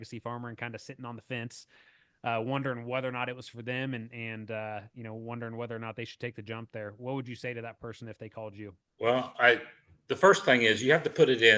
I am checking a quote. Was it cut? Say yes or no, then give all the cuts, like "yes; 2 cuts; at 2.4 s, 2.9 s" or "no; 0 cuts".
no; 0 cuts